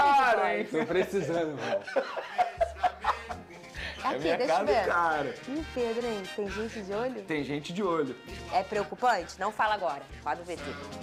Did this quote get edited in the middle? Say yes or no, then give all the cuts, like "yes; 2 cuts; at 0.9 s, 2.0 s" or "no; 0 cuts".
no; 0 cuts